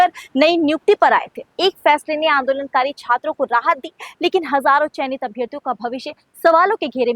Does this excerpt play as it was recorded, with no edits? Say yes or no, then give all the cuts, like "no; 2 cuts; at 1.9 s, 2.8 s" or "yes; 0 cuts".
no; 1 cut; at 1.4 s